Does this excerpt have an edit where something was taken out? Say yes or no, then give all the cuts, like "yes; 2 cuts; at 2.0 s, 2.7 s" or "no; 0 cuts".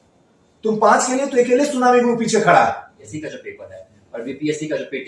yes; 1 cut; at 3.0 s